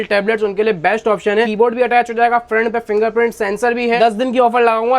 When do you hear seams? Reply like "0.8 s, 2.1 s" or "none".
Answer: 1.5 s, 4.0 s